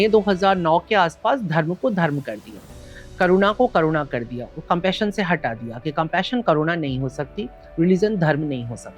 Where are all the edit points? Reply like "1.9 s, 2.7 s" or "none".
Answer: none